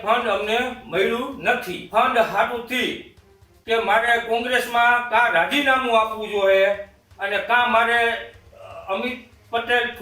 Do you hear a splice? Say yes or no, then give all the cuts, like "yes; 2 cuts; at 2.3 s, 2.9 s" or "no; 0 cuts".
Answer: yes; 1 cut; at 1.8 s